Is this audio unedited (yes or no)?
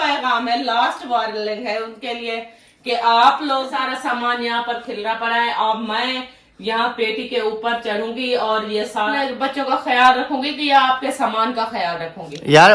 no